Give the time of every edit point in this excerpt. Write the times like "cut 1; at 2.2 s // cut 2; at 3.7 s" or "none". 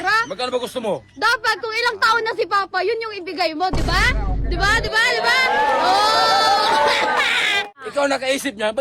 cut 1; at 7.7 s